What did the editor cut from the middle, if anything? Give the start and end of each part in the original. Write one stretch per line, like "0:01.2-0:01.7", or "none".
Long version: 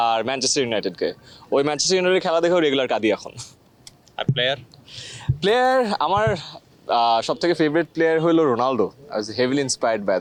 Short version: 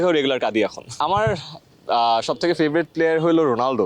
0:03.5-0:06.0